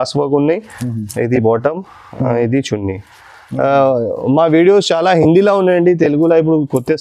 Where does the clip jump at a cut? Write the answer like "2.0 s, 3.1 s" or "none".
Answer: none